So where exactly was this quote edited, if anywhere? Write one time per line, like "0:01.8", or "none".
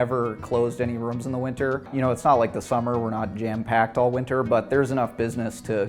0:01.9